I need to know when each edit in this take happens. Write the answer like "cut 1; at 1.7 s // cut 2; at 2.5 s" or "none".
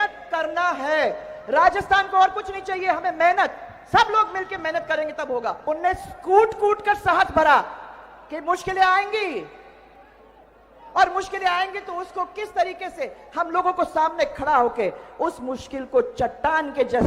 cut 1; at 5.6 s